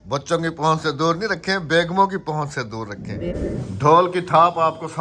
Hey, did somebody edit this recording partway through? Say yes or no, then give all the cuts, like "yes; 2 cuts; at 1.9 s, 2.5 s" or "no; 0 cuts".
yes; 1 cut; at 3.4 s